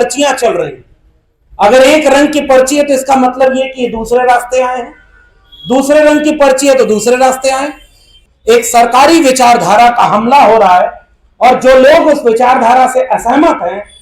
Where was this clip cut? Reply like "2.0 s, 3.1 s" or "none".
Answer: 8.1 s